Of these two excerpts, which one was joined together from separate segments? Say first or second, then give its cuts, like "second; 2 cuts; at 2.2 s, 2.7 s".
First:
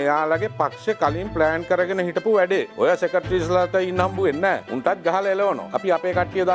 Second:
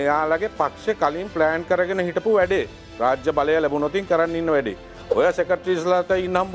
first; 3 cuts; at 2.8 s, 4.7 s, 5.7 s